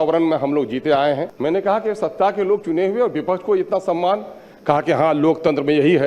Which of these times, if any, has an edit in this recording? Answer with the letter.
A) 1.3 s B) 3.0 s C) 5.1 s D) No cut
A